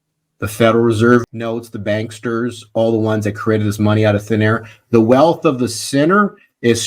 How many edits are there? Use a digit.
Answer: 1